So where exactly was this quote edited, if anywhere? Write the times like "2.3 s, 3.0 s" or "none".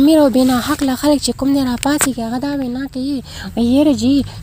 none